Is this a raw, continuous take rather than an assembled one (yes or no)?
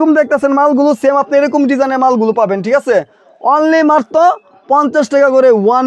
yes